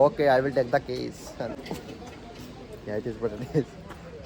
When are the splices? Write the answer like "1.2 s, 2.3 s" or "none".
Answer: none